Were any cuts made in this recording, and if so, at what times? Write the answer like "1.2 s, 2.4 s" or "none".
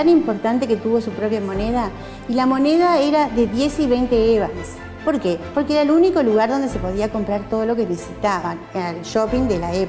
none

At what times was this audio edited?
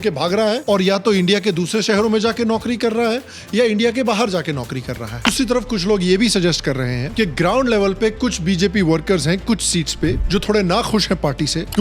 5.3 s

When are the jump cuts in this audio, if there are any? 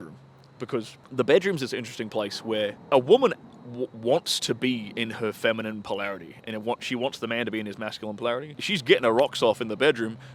1.0 s, 2.8 s, 8.6 s

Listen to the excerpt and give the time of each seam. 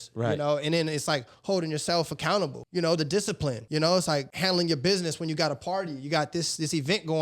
2.6 s, 3.6 s, 4.3 s

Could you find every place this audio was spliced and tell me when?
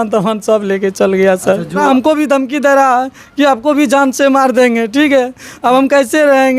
1.8 s

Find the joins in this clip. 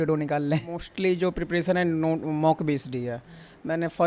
1.0 s

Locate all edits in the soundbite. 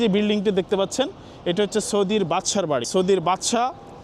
2.9 s

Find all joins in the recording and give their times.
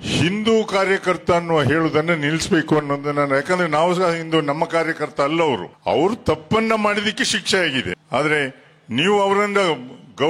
5.7 s, 8.0 s

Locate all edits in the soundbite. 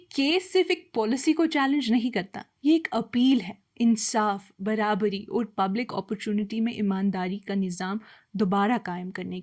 none

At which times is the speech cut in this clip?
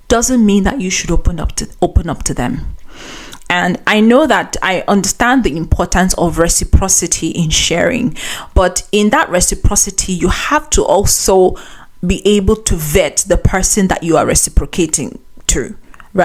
none

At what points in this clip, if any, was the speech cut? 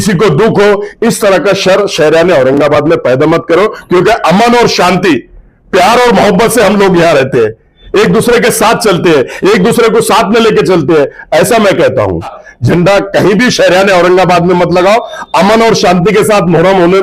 12.5 s

